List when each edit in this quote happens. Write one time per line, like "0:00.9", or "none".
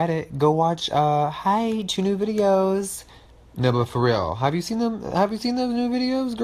0:05.4